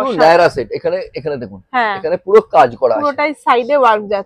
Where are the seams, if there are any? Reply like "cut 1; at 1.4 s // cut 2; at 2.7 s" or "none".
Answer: none